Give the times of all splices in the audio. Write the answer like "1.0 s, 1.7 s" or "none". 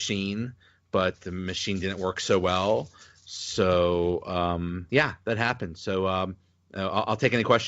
4.8 s